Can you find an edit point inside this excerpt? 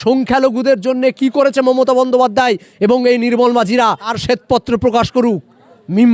yes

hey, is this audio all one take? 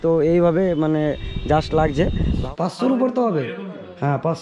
no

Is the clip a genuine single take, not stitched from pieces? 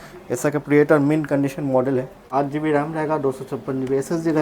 no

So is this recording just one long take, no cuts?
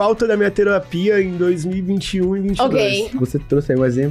no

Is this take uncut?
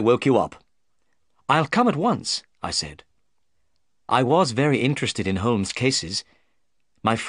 no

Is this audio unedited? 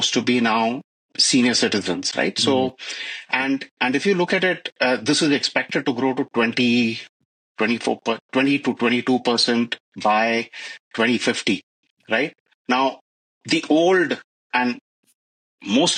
yes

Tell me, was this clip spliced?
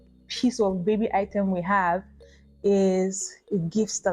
no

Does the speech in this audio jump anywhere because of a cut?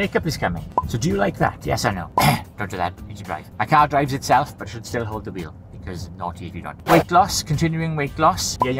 no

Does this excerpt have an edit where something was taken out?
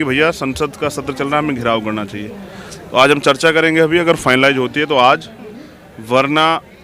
no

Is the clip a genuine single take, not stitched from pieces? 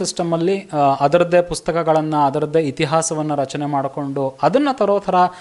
yes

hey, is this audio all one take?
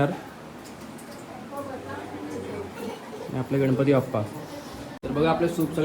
no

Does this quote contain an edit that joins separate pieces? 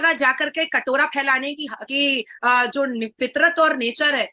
no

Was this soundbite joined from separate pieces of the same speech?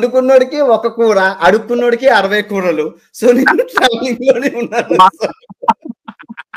no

